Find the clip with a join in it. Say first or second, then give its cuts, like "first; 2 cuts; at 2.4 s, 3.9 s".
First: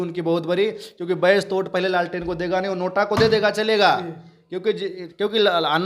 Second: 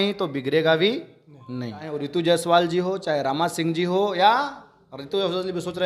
second; 1 cut; at 2.0 s